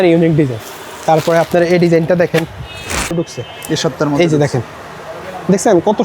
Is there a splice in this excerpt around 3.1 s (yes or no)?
yes